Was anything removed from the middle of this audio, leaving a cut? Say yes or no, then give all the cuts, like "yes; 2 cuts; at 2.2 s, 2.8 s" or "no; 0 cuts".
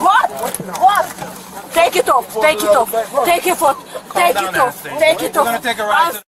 yes; 1 cut; at 1.7 s